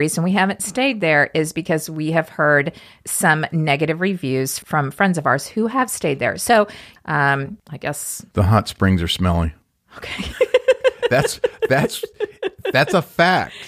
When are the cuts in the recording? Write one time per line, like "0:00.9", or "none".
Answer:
0:04.6
0:06.8